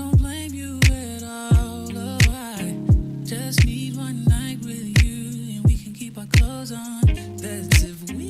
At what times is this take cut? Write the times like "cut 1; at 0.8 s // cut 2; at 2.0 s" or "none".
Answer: cut 1; at 2.3 s